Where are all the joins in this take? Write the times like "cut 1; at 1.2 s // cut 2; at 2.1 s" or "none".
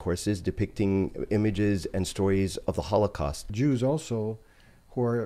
cut 1; at 3.5 s